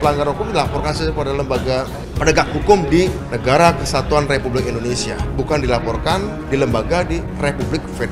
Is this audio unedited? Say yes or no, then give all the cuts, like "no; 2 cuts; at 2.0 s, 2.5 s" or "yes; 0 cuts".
no; 5 cuts; at 2.0 s, 3.3 s, 5.2 s, 6.4 s, 7.3 s